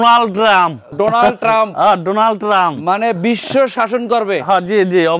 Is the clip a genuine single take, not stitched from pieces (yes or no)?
yes